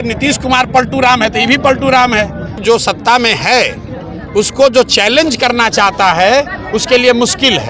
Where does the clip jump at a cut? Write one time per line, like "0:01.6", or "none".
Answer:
0:02.6

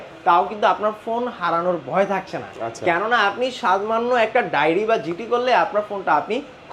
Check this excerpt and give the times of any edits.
none

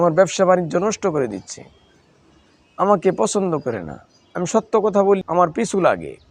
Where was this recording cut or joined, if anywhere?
0:05.2

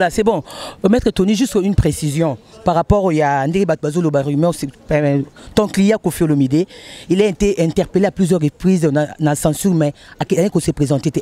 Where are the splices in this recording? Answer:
none

